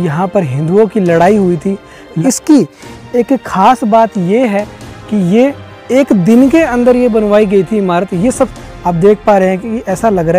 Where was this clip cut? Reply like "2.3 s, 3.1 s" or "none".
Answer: 2.2 s, 8.5 s